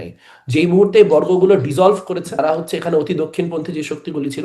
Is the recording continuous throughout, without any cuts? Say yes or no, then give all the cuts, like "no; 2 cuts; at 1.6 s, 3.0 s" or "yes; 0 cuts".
no; 1 cut; at 2.4 s